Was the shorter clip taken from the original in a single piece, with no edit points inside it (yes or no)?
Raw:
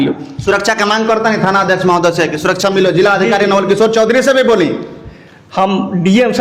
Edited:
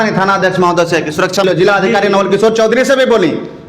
no